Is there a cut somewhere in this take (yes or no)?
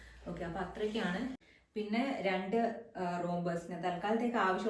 yes